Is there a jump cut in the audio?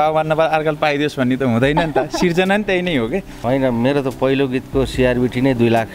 yes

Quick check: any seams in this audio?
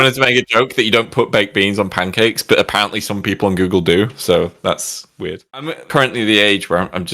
yes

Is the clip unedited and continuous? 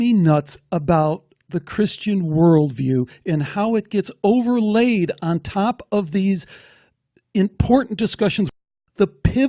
no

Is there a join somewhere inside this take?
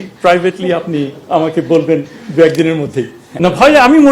yes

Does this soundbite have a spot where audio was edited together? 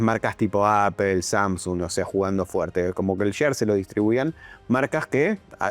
no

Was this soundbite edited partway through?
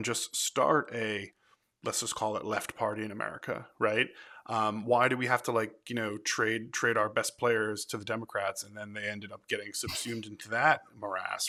no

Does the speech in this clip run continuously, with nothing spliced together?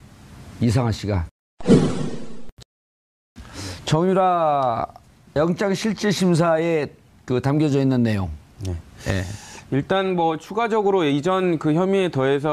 no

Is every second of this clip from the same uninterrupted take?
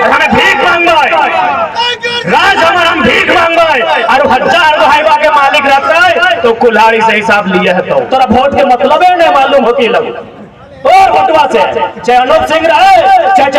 no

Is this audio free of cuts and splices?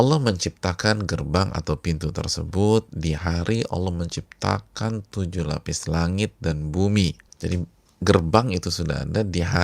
no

